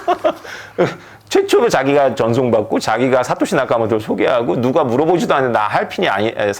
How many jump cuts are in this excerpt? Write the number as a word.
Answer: zero